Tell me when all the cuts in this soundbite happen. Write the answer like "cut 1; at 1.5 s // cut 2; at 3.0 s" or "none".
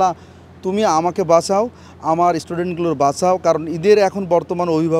none